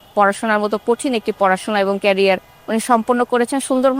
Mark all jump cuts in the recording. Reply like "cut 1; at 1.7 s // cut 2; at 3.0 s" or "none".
none